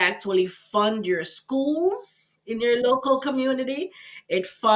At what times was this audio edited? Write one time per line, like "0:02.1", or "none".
none